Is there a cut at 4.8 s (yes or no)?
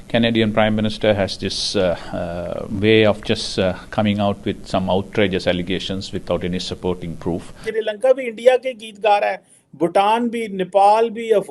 no